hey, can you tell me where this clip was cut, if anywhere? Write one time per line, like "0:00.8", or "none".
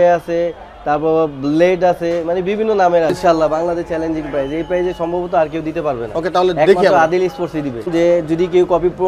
0:03.1
0:07.9